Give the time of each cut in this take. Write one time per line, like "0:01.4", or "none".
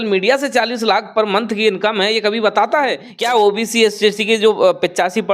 0:03.1